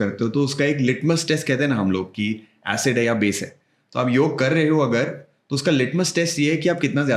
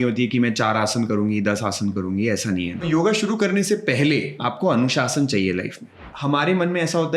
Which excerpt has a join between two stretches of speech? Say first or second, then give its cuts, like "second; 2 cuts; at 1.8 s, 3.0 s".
second; 3 cuts; at 2.8 s, 4.4 s, 6.0 s